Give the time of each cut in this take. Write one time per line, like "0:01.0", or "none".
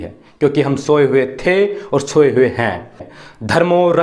0:03.1